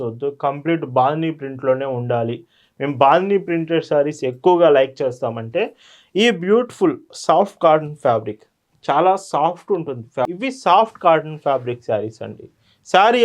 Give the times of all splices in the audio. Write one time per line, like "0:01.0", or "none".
0:10.3